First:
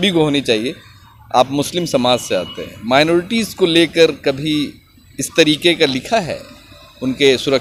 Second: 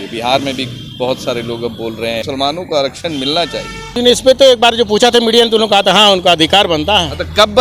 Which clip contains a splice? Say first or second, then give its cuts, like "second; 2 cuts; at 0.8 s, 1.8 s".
second; 2 cuts; at 2.2 s, 4.0 s